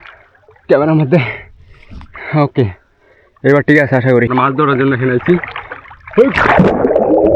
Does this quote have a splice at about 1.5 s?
no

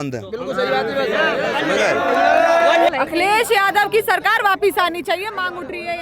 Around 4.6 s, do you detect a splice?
no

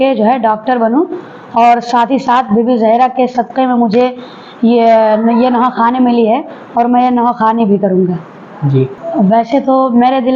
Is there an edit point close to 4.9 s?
no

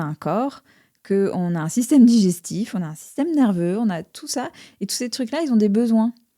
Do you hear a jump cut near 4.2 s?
no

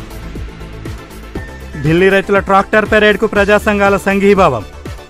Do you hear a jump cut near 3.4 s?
no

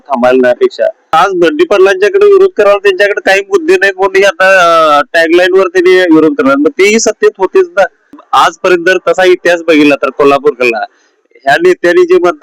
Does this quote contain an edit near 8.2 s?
yes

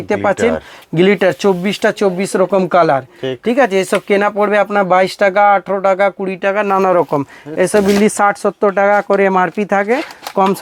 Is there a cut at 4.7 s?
no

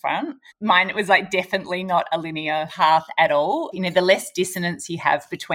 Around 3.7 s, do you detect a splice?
yes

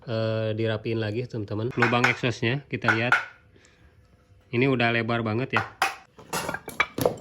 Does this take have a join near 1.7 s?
yes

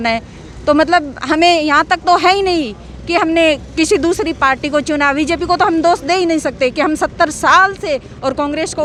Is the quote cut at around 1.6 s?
no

